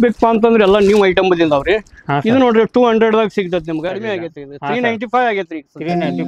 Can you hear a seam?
yes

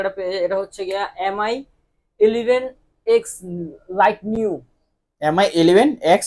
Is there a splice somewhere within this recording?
no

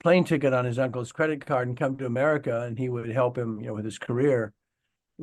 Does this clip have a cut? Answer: no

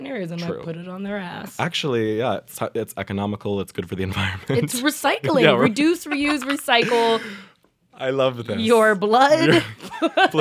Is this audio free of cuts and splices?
yes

